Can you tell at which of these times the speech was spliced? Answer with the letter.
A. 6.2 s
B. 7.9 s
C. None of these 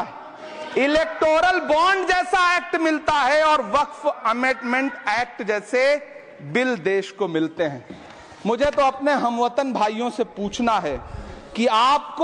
C